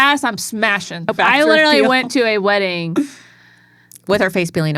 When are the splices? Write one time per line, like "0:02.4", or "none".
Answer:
0:01.1

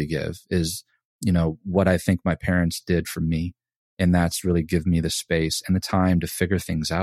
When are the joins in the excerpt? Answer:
none

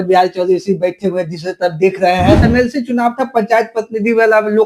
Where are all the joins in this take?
0:02.4

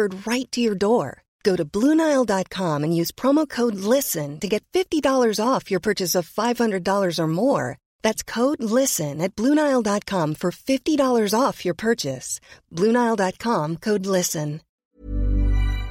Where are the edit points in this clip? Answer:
0:14.7

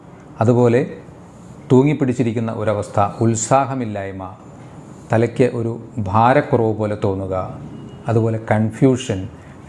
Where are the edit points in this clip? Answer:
none

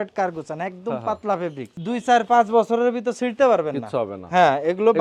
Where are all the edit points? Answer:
0:01.7

